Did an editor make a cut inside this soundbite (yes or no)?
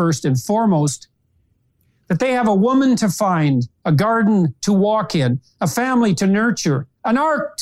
yes